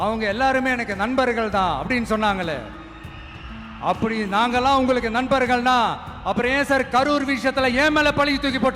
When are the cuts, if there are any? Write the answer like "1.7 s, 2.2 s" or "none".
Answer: none